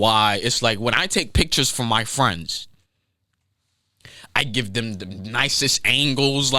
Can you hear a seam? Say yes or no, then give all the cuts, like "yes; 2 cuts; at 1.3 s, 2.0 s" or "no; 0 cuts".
no; 0 cuts